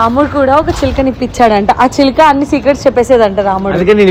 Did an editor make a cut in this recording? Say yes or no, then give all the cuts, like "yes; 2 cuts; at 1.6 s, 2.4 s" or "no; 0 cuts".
no; 0 cuts